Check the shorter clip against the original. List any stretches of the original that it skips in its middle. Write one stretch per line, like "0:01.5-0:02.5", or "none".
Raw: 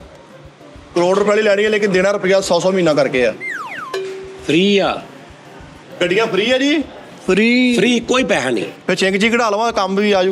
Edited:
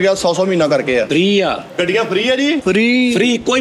0:03.3-0:04.5
0:05.0-0:05.9
0:06.8-0:07.2